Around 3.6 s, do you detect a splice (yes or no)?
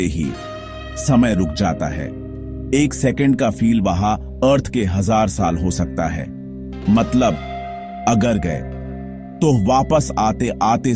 yes